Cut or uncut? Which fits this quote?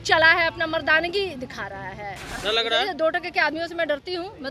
cut